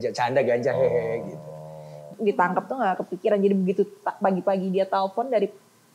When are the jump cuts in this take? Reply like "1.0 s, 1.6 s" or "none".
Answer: 2.0 s